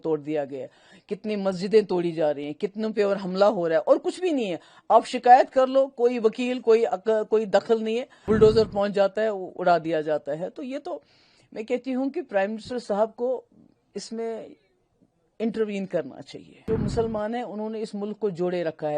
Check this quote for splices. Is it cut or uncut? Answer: cut